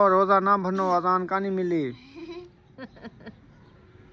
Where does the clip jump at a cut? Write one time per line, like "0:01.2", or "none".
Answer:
none